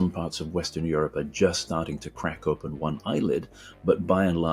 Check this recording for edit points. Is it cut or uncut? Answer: uncut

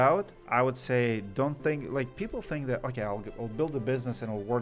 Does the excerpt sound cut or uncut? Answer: uncut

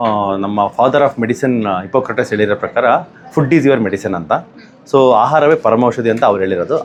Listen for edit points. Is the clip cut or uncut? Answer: uncut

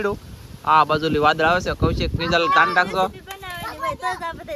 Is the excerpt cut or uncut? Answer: uncut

